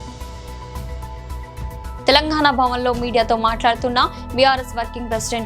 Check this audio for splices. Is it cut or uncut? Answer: uncut